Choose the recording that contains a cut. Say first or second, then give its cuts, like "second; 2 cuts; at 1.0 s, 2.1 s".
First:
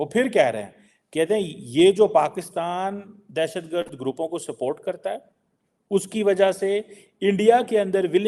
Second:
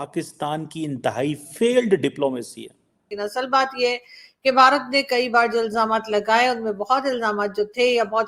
second; 1 cut; at 3.0 s